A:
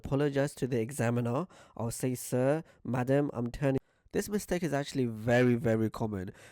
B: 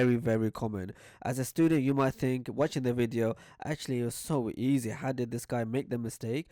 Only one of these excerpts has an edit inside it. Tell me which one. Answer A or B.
A